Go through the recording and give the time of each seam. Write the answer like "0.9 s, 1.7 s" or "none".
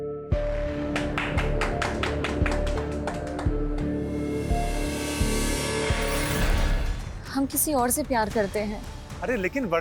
6.9 s

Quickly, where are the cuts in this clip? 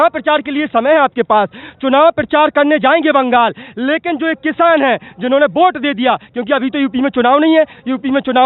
none

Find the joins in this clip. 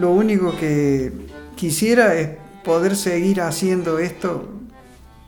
none

